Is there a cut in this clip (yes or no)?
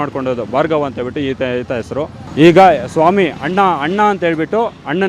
yes